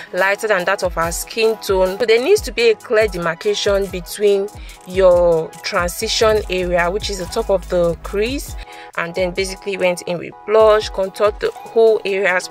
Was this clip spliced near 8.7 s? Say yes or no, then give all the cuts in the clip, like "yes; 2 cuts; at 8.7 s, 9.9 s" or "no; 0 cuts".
yes; 2 cuts; at 2.0 s, 8.7 s